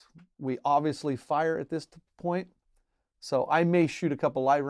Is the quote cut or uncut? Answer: uncut